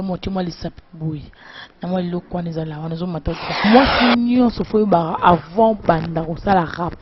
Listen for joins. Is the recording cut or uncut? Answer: cut